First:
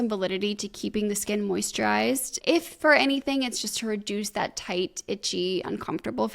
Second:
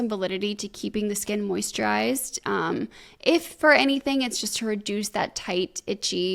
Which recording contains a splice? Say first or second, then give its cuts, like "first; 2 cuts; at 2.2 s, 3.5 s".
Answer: first; 1 cut; at 2.3 s